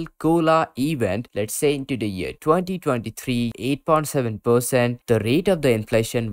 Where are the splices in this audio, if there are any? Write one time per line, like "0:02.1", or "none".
0:01.3
0:03.5
0:05.0